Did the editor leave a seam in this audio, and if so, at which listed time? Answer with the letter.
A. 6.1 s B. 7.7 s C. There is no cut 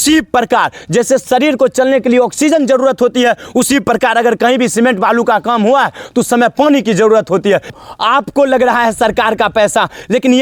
B